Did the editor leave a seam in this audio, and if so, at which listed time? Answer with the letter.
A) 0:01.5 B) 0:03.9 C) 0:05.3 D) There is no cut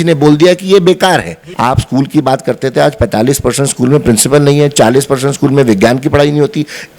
A